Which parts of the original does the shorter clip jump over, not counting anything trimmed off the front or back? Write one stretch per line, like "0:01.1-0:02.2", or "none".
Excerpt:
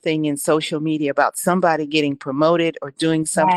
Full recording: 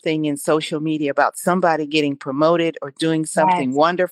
none